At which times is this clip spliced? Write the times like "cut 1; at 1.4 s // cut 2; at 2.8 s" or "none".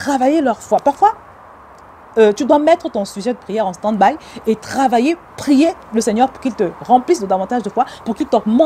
none